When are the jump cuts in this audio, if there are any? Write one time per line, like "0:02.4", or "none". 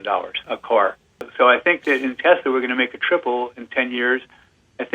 0:01.3